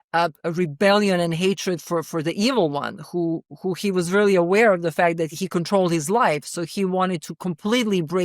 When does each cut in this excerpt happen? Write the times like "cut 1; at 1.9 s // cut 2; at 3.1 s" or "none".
cut 1; at 2.1 s // cut 2; at 5.4 s